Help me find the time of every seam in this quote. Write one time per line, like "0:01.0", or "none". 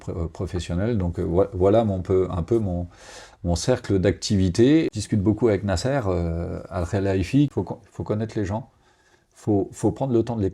0:04.9
0:07.5